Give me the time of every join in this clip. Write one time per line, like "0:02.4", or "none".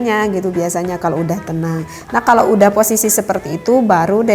none